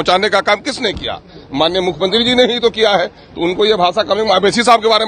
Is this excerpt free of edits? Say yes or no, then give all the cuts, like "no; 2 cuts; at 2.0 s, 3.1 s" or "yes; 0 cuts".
yes; 0 cuts